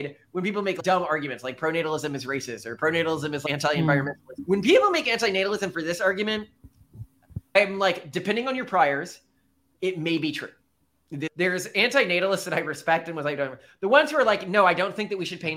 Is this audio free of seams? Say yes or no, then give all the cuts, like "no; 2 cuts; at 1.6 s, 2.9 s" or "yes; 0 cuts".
no; 5 cuts; at 0.8 s, 3.4 s, 4.3 s, 7.6 s, 11.3 s